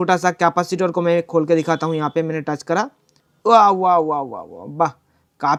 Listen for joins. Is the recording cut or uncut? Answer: uncut